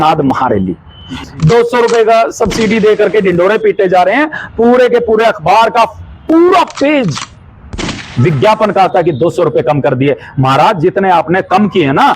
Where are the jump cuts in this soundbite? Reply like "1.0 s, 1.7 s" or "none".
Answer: 1.2 s